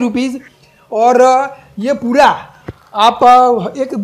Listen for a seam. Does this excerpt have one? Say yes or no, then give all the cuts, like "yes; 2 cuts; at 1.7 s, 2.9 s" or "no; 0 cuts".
no; 0 cuts